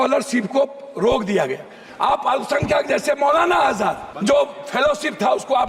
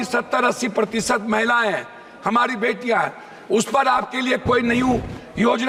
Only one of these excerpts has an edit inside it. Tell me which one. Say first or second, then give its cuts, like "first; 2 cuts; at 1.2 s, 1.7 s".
first; 2 cuts; at 1.8 s, 4.1 s